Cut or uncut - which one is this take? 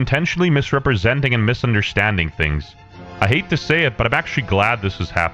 cut